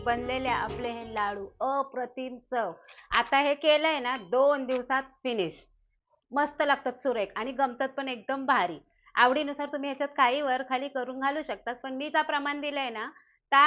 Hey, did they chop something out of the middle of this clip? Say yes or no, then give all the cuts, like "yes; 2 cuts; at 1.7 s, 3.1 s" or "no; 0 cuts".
no; 0 cuts